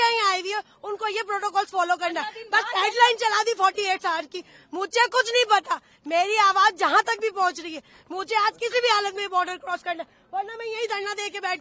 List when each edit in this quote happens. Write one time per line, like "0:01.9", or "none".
none